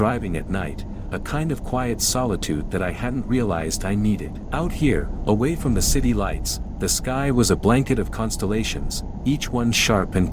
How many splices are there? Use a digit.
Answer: 1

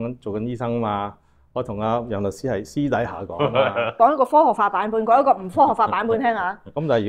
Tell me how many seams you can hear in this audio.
1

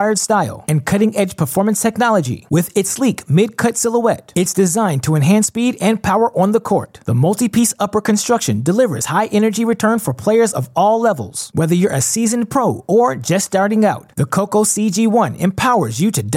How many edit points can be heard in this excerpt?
0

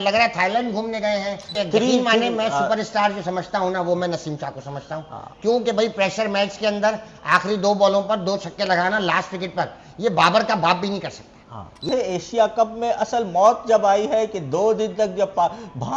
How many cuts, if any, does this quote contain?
2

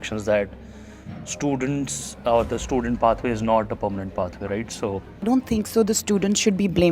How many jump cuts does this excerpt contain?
1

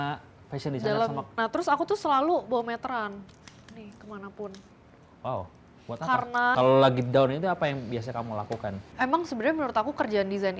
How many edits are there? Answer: 3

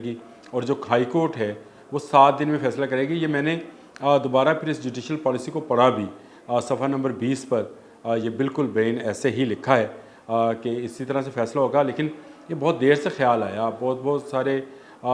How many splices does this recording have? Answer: 0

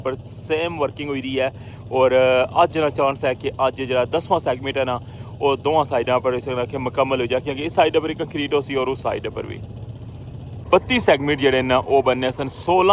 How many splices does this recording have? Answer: 1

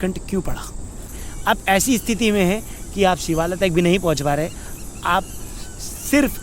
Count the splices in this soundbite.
1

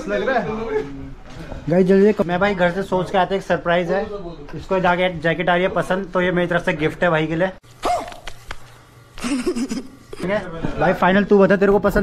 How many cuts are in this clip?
3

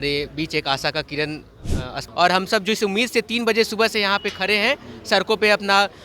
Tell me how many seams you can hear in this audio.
1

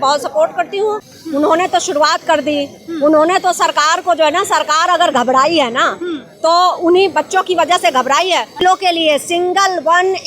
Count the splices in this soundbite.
2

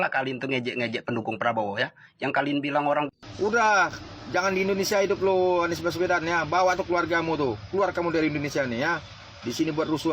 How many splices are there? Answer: 1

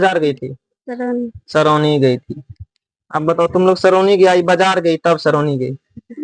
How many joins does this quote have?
0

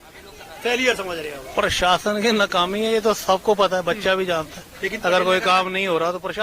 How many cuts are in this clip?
0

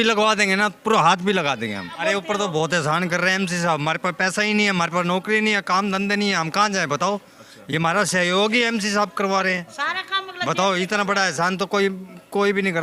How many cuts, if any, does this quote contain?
1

